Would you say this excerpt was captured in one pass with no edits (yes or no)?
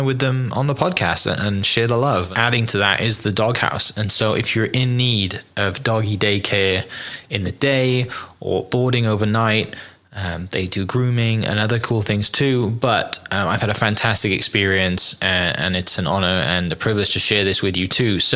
no